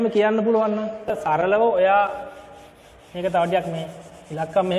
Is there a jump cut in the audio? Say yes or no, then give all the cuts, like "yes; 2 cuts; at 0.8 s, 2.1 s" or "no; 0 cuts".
yes; 1 cut; at 1.1 s